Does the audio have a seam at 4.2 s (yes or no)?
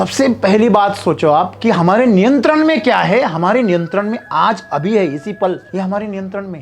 no